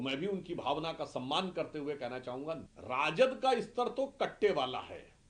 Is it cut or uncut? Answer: cut